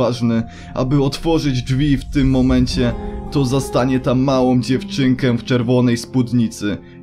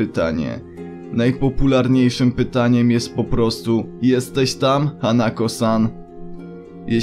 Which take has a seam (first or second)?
second